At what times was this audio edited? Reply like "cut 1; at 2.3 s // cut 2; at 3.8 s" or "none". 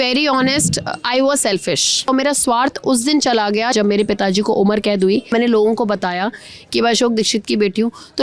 cut 1; at 2.1 s // cut 2; at 3.7 s // cut 3; at 5.3 s